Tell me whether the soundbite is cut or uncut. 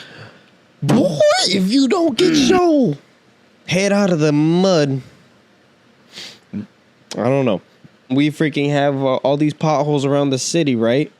cut